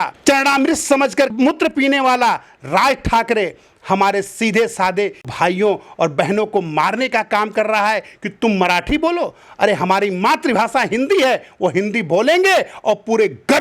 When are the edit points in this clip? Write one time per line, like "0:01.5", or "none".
0:05.3